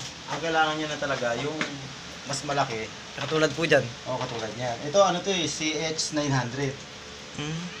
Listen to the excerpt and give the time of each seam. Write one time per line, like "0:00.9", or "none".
none

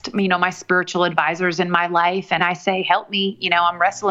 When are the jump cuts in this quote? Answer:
0:02.4

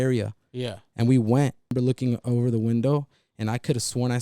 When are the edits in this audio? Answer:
0:01.7

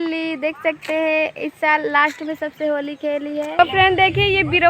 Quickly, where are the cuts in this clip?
0:03.6

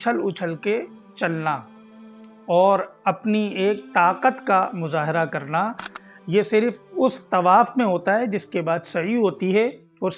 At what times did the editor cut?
0:05.9

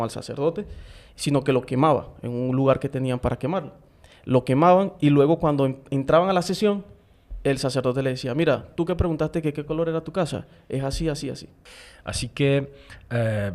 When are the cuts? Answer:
0:11.5

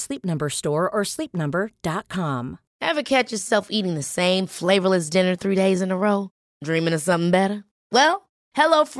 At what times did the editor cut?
0:02.6

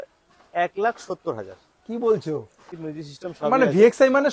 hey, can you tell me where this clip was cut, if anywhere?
0:02.7

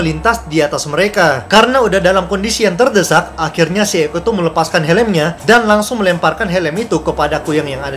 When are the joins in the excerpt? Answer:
0:01.4

